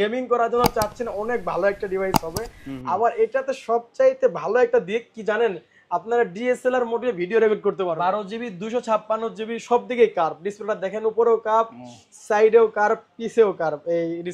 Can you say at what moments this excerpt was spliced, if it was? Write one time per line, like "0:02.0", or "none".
0:07.9